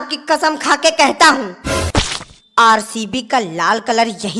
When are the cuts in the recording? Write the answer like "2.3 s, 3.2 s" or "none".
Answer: 1.8 s